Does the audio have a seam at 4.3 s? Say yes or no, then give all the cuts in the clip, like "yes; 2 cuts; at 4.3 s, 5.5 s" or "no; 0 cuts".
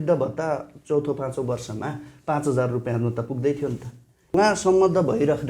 yes; 1 cut; at 4.3 s